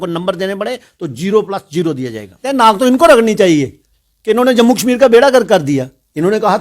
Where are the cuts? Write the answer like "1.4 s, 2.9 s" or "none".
2.4 s